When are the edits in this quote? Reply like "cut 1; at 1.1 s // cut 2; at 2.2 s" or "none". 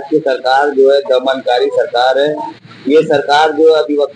none